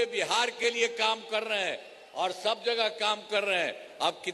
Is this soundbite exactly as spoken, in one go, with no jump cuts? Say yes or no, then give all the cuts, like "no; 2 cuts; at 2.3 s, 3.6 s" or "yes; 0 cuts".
yes; 0 cuts